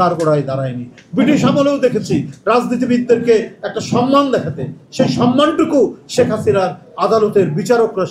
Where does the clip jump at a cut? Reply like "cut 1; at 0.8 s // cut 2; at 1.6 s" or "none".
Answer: none